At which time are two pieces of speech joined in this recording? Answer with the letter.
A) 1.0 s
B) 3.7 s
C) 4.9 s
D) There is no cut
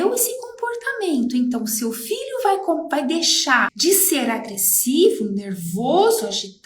B